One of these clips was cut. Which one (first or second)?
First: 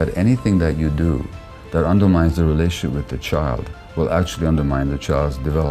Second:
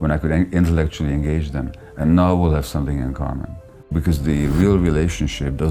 second